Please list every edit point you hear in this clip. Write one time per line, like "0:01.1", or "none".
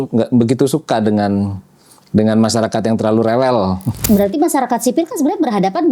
0:03.9

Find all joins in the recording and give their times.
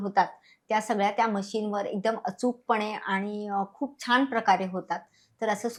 none

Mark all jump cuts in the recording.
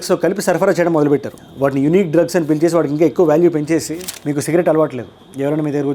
0:04.0

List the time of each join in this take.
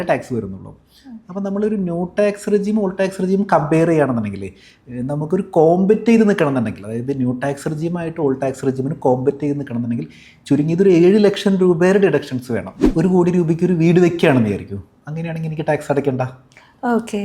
0:12.9

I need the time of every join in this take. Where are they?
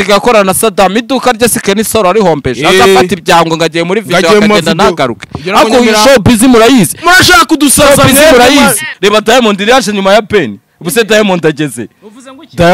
0:08.9

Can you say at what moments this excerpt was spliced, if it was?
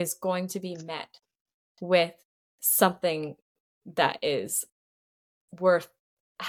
none

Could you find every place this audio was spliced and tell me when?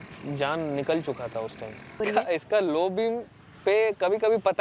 0:02.0

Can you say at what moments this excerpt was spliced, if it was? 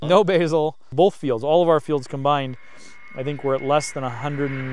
0:00.9

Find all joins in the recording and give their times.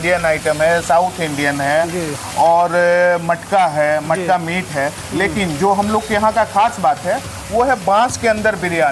none

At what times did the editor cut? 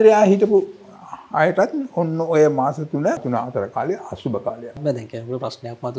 0:03.2
0:04.8

